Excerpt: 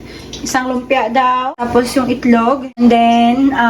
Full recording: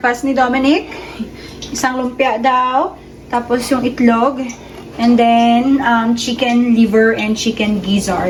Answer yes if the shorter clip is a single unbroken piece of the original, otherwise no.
no